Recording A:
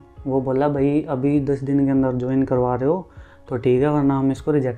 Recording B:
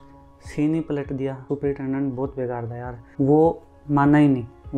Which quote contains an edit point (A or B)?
B